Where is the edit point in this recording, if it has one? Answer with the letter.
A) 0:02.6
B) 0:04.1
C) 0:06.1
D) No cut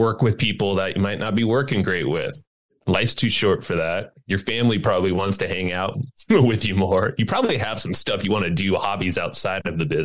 A